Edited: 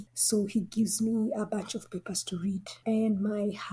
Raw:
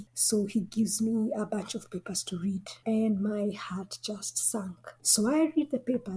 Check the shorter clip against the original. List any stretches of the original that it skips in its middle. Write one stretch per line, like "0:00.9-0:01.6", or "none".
none